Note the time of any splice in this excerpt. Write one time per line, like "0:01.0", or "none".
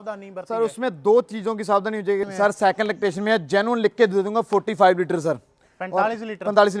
0:02.3